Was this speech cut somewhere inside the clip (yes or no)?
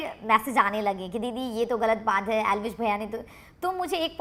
no